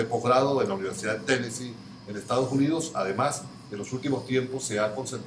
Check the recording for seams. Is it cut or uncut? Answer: uncut